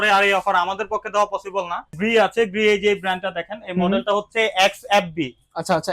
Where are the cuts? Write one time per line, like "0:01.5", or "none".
0:02.0